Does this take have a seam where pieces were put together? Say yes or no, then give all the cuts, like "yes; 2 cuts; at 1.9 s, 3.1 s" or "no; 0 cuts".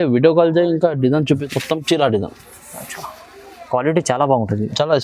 yes; 1 cut; at 1.4 s